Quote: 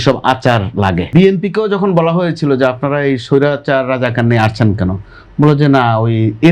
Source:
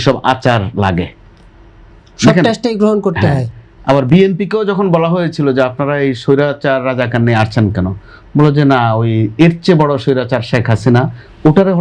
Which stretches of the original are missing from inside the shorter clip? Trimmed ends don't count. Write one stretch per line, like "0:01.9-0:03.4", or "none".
0:01.1-0:04.1